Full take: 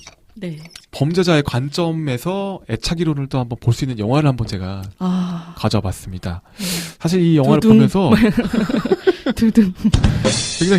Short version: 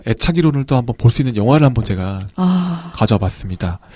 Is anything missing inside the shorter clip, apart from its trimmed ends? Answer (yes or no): no